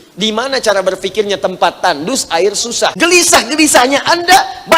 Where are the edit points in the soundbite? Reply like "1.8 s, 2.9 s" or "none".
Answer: 2.9 s